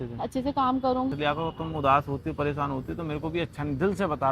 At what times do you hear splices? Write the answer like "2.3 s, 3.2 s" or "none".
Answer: 1.1 s